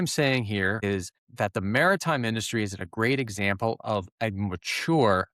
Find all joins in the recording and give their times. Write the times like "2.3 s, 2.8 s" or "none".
0.9 s